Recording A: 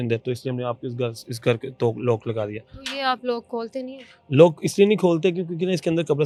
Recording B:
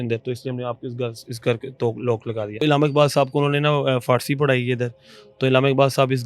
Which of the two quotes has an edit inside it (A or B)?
B